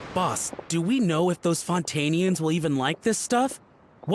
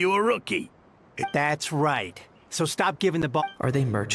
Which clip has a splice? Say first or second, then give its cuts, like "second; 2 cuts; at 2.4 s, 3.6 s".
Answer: second; 2 cuts; at 1.3 s, 3.4 s